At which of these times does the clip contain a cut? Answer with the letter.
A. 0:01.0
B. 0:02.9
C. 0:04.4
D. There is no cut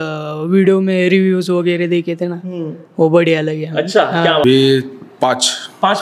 C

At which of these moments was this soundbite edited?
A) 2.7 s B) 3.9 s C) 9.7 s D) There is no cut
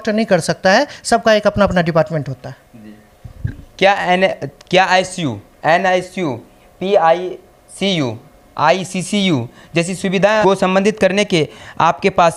D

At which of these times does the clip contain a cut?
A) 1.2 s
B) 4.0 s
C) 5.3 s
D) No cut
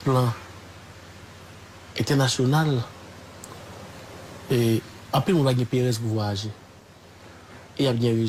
D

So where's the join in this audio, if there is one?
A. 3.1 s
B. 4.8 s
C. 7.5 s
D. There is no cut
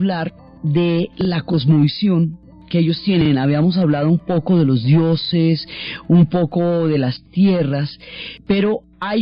D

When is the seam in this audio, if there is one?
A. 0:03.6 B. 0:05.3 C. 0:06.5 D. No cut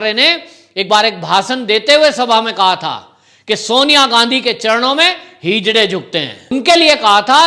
C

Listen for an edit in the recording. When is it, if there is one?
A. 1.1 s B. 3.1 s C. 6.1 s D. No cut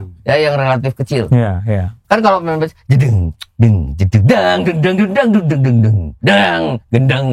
C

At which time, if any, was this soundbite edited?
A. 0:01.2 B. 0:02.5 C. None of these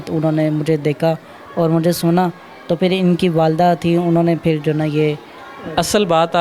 C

